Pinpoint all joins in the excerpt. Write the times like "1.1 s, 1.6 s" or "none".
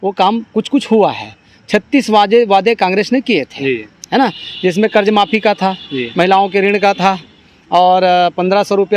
none